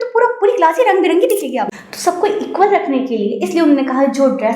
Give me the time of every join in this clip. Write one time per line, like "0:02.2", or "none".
0:01.7

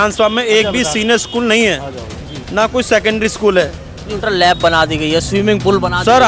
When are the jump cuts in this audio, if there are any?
0:04.1

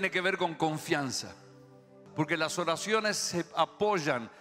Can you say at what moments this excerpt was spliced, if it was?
0:02.0

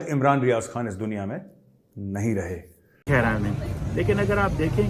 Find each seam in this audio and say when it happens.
0:03.1

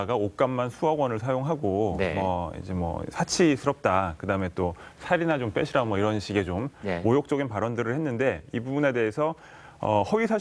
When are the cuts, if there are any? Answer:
none

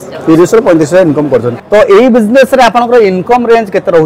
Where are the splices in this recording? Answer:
0:01.5

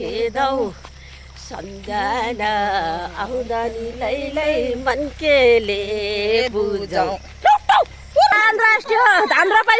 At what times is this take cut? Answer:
0:08.4

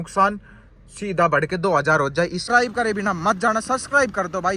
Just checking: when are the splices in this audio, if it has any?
0:02.4

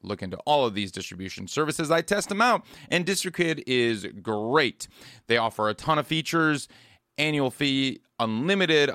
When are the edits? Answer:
none

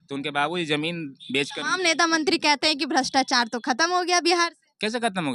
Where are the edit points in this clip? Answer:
none

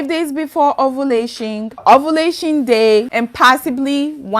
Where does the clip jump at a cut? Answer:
0:01.8
0:03.1

